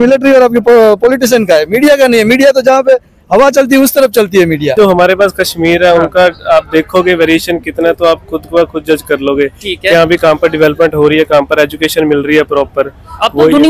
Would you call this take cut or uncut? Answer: cut